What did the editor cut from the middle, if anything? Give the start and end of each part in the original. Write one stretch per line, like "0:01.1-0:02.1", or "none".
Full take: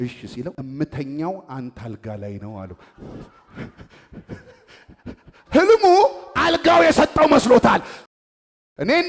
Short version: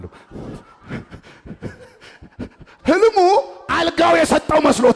none